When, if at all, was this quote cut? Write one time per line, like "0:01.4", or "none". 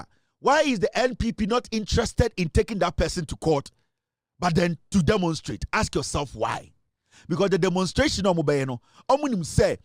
none